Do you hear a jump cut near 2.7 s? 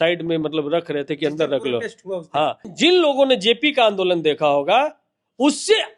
yes; 1 cut; at 2.7 s

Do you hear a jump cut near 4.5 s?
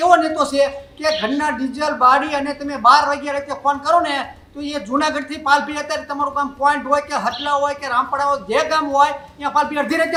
no; 0 cuts

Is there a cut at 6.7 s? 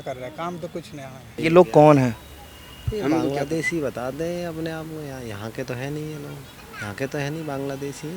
yes; 2 cuts; at 1.2 s, 6.7 s

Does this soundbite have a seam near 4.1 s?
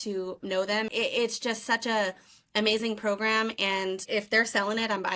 yes; 2 cuts; at 0.9 s, 4.1 s

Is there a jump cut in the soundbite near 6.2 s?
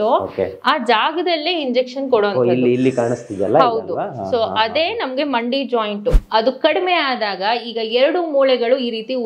yes; 1 cut; at 6.2 s

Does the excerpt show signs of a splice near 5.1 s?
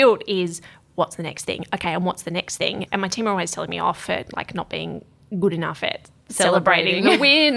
no; 1 cut; at 2.8 s

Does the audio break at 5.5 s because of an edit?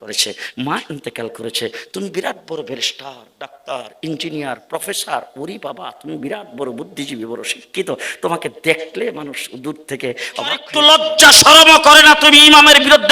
no; 1 cut; at 10.7 s

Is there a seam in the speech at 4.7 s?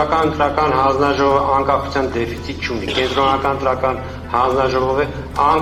no; 0 cuts

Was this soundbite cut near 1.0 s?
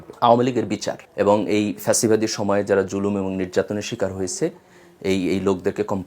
yes; 1 cut; at 1.0 s

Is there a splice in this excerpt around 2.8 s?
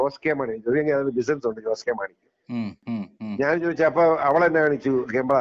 yes; 1 cut; at 2.8 s

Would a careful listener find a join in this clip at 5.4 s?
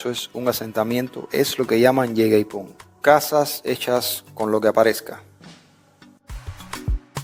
no; 0 cuts

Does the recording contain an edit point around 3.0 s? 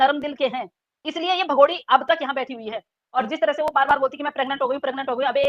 yes; 1 cut; at 3.0 s

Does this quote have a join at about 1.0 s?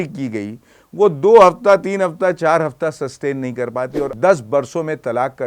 no; 1 cut; at 4.1 s

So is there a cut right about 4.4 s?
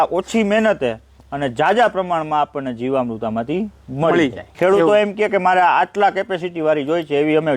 yes; 1 cut; at 4.4 s

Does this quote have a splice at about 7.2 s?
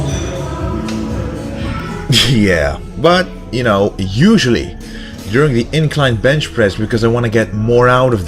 yes; 1 cut; at 7.2 s

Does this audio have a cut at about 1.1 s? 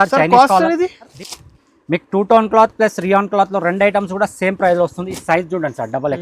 yes; 1 cut; at 1.1 s

